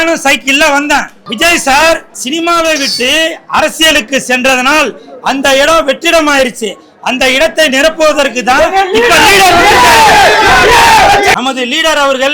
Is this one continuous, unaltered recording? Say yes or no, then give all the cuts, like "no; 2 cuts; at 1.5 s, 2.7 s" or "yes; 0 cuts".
no; 3 cuts; at 1.2 s, 2.1 s, 11.3 s